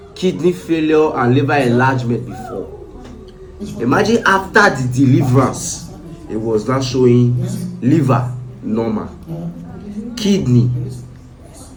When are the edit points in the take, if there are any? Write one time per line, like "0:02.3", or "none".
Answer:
none

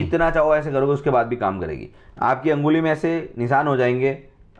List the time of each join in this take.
none

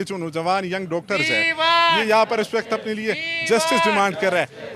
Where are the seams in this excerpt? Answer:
none

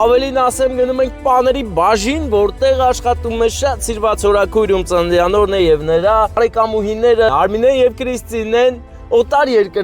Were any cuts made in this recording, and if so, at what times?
0:06.3
0:07.3

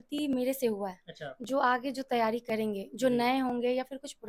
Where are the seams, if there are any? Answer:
none

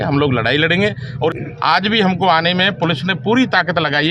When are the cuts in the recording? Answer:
0:01.4

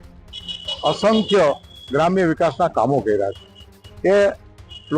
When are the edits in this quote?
none

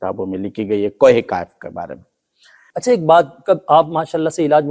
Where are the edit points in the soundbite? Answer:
0:02.7

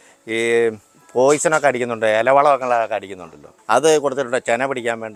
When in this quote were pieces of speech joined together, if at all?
none

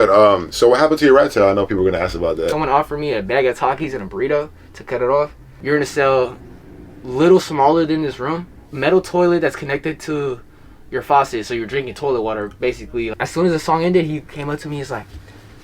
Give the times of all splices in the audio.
0:02.5
0:05.5
0:08.7
0:13.1

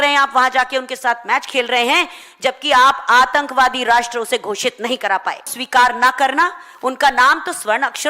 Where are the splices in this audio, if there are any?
0:05.6

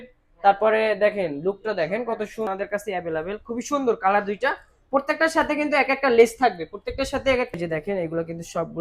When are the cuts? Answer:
0:02.4
0:07.5

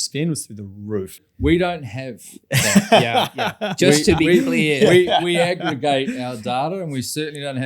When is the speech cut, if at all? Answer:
0:01.3

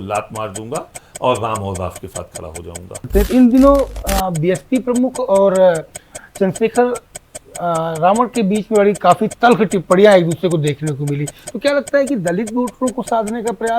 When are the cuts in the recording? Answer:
0:03.1

